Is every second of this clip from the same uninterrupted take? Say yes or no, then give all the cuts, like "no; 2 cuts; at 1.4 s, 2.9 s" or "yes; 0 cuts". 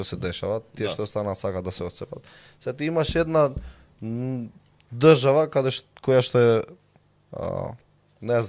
yes; 0 cuts